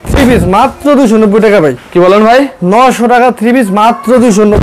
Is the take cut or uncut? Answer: uncut